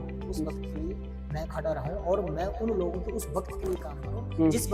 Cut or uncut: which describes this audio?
uncut